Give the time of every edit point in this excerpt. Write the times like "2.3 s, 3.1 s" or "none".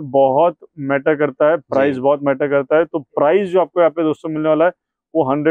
none